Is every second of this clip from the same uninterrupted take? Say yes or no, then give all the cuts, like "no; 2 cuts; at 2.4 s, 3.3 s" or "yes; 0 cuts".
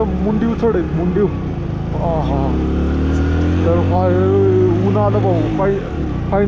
yes; 0 cuts